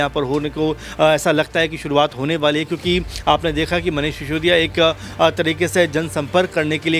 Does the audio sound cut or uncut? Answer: uncut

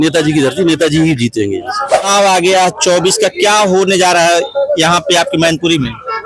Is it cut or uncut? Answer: cut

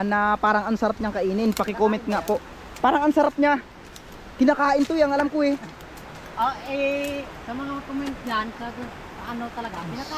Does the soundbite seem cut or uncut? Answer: uncut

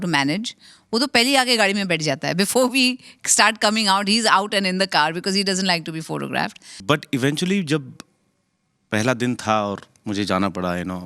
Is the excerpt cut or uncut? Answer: cut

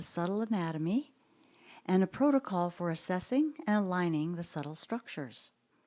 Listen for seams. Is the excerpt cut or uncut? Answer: uncut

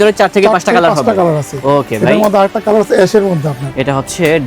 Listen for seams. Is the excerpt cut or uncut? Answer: uncut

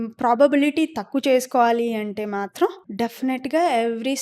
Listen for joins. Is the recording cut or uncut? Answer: cut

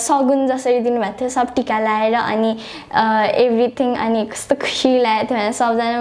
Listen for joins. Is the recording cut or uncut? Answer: uncut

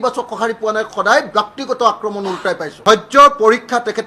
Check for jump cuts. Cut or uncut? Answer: cut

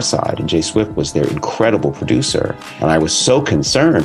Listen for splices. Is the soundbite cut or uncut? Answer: cut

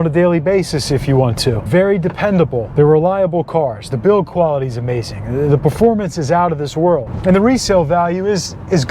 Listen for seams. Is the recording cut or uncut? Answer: cut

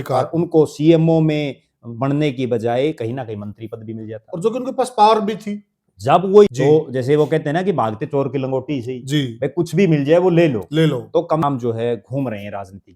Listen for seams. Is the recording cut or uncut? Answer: cut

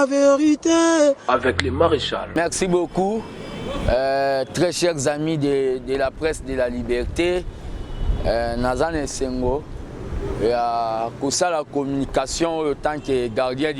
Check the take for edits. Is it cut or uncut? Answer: uncut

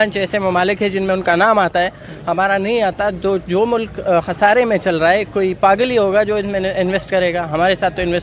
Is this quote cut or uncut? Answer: uncut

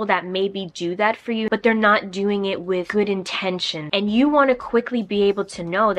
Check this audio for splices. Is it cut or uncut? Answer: cut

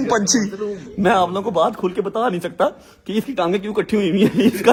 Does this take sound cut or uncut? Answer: uncut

